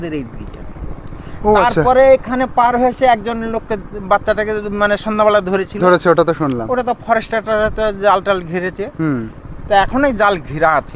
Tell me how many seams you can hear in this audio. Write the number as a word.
zero